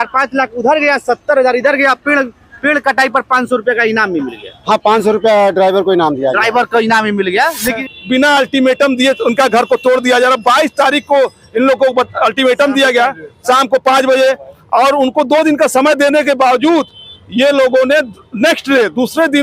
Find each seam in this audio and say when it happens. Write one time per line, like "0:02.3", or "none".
0:07.8